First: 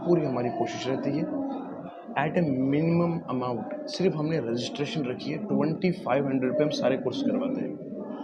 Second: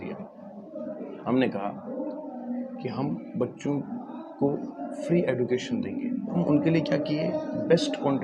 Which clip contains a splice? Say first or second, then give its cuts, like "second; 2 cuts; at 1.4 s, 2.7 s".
second; 1 cut; at 6.4 s